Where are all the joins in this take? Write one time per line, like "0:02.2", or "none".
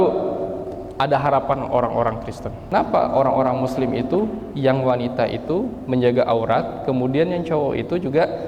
0:02.6